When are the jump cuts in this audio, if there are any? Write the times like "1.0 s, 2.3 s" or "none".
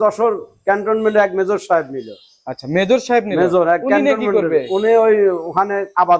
none